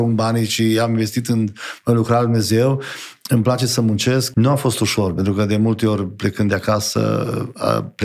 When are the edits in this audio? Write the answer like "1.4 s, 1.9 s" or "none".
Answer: 4.3 s